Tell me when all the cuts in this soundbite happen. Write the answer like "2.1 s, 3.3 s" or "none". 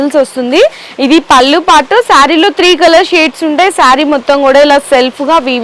none